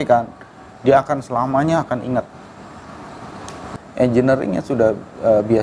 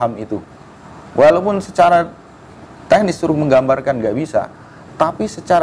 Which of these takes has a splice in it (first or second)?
first